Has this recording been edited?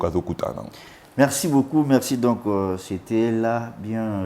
no; 0 cuts

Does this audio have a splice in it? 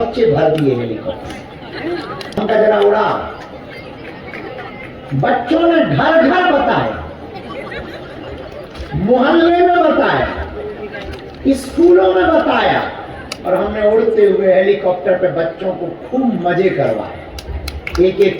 yes; 1 cut; at 2.4 s

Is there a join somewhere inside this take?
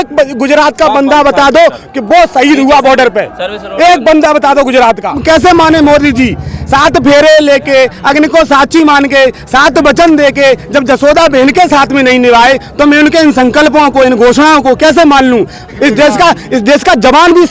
yes; 2 cuts; at 5.2 s, 15.7 s

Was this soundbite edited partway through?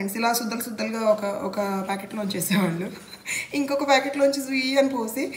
no; 0 cuts

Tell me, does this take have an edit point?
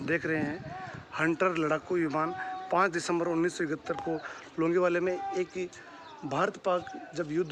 no; 0 cuts

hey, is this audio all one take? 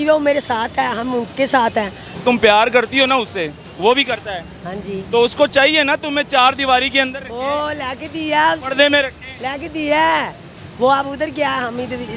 no; 1 cut; at 2.0 s

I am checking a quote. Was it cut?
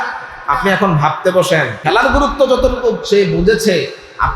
yes; 1 cut; at 1.8 s

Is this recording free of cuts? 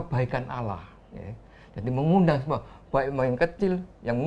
yes; 0 cuts

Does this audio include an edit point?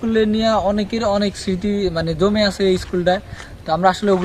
no; 0 cuts

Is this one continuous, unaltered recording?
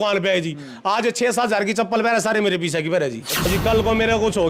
no; 1 cut; at 3.5 s

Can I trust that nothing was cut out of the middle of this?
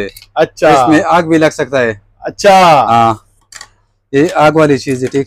yes; 0 cuts

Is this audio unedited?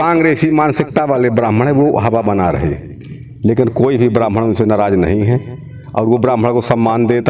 yes; 0 cuts

